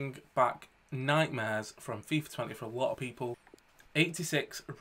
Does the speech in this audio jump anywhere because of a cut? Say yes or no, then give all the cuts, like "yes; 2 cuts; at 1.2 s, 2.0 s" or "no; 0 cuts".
yes; 1 cut; at 3.1 s